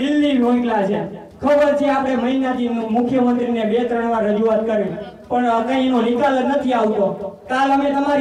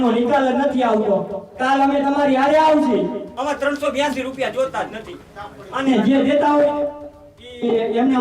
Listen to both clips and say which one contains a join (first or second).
second